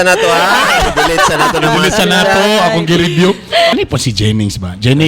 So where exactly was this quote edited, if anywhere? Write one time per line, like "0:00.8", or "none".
0:03.7